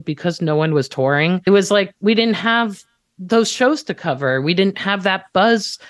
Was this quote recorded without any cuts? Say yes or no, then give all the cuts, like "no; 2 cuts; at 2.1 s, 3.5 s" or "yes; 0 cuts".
no; 1 cut; at 1.4 s